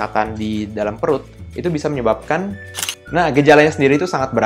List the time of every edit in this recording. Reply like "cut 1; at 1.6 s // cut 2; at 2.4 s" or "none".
cut 1; at 2.7 s